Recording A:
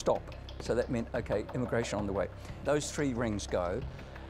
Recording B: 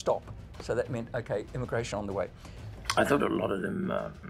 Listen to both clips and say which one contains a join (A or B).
B